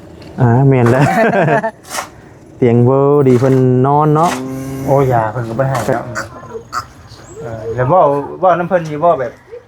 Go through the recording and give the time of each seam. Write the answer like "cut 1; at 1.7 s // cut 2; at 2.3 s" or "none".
cut 1; at 4.4 s